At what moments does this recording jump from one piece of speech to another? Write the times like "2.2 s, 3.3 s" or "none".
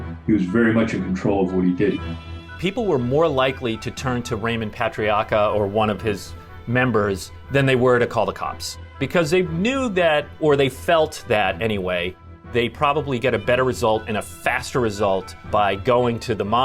2.0 s, 9.0 s, 12.5 s, 15.4 s